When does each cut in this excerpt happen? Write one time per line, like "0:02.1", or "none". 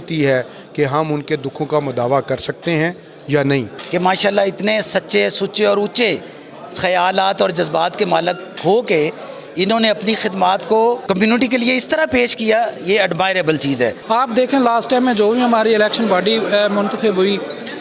0:03.8
0:11.0
0:14.0